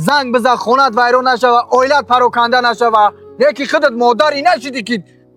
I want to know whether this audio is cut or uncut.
uncut